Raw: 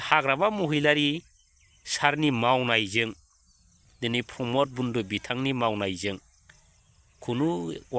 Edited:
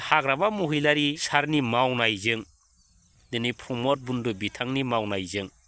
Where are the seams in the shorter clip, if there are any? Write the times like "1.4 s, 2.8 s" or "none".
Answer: 1.2 s